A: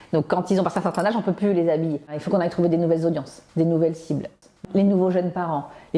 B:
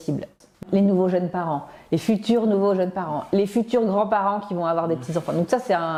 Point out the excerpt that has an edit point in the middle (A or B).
A